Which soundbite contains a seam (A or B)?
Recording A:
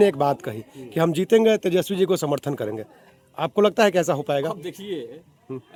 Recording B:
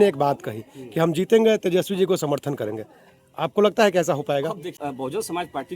B